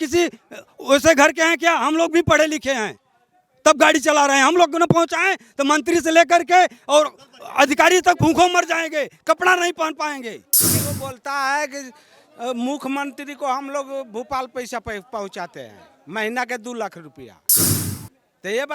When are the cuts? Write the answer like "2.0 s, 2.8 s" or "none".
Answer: 10.5 s